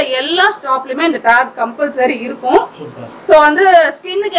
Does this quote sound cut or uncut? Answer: uncut